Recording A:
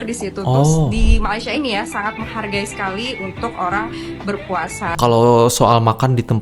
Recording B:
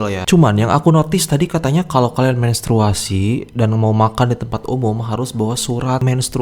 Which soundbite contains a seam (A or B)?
A